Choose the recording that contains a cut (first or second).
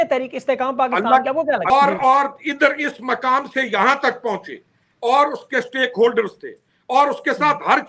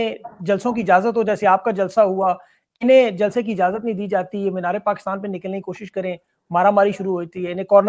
first